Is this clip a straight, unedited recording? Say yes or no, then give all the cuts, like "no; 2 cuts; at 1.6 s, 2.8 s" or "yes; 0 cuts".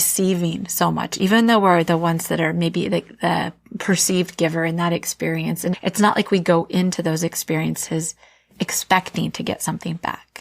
yes; 0 cuts